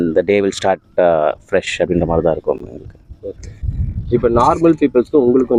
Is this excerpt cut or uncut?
uncut